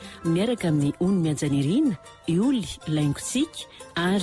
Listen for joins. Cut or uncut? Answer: uncut